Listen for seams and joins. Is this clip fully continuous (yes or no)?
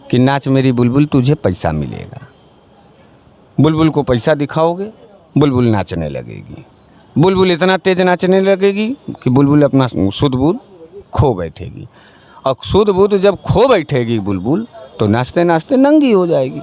no